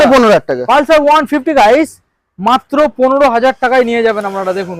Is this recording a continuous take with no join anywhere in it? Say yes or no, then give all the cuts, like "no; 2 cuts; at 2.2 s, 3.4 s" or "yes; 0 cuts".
yes; 0 cuts